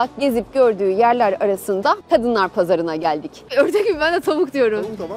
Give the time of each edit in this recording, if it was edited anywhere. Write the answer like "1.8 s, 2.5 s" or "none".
2.0 s, 3.5 s